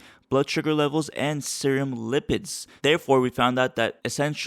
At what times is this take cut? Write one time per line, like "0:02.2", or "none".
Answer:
0:02.7